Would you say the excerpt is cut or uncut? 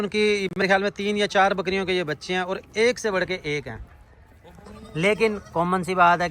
uncut